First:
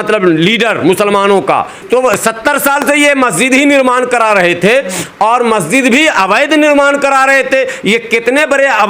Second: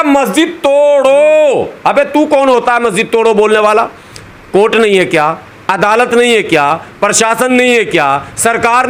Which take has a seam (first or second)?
first